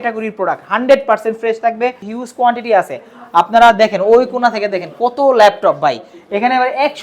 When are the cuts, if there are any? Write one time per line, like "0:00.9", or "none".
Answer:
0:02.1